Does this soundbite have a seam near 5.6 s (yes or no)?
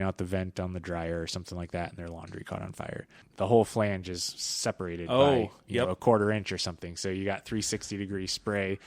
no